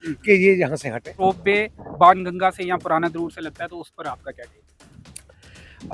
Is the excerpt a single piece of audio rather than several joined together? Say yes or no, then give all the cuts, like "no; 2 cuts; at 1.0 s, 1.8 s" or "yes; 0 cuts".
no; 1 cut; at 1.2 s